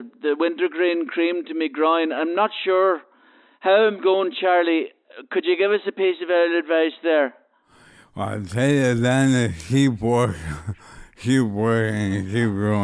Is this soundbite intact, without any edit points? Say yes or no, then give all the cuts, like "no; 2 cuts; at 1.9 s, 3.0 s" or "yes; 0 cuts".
yes; 0 cuts